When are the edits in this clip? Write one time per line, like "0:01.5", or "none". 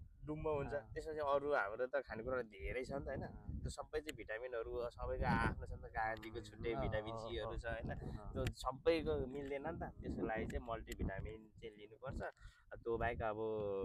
none